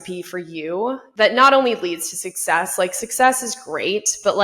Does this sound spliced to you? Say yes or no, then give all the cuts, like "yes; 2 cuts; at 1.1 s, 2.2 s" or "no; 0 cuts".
yes; 1 cut; at 1.0 s